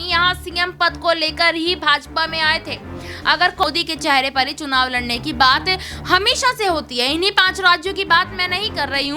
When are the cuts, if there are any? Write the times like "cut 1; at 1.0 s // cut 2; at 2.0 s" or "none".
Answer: cut 1; at 3.6 s